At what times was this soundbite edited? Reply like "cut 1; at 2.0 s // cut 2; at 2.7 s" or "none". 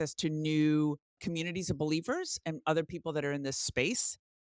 cut 1; at 1.2 s